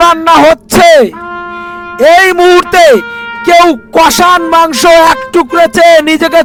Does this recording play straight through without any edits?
yes; 0 cuts

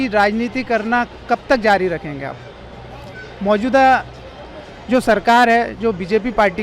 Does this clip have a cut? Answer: no; 0 cuts

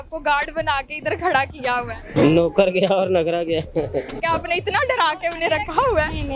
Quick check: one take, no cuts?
no; 2 cuts; at 2.1 s, 4.2 s

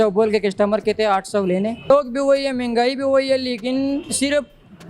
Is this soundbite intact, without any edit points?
no; 1 cut; at 1.9 s

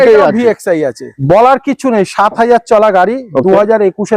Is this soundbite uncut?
no; 1 cut; at 1.1 s

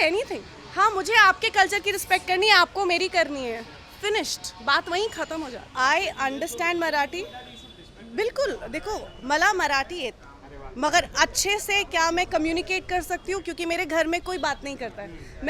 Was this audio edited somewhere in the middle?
yes; 1 cut; at 5.6 s

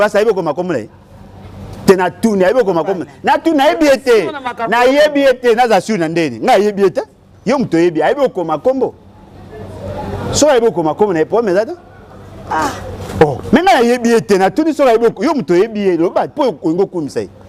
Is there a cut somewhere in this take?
no; 0 cuts

